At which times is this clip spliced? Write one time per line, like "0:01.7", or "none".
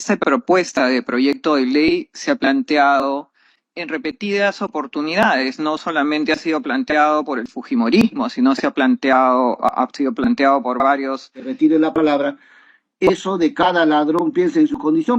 0:11.4